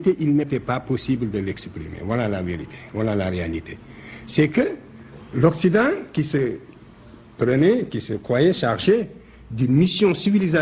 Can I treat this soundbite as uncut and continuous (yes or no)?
yes